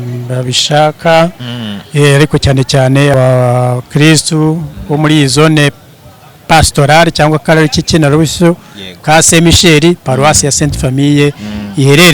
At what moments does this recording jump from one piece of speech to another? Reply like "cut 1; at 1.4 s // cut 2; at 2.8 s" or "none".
cut 1; at 3.1 s